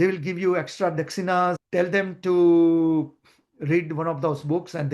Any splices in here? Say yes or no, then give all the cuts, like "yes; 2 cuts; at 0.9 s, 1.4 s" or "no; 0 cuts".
yes; 1 cut; at 1.6 s